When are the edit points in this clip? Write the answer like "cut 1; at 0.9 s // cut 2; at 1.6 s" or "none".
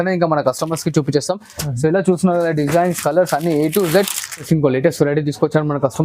cut 1; at 4.5 s